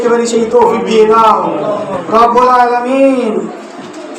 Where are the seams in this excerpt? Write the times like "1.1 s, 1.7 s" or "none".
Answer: 1.9 s